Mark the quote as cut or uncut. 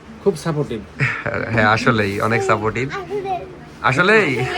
uncut